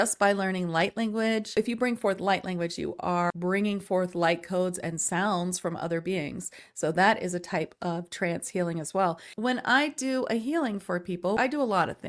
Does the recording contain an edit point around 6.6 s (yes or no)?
no